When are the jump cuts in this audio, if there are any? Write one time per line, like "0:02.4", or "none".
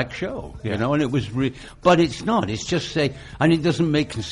none